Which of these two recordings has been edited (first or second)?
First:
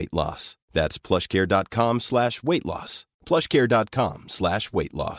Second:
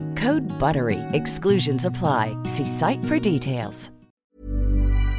second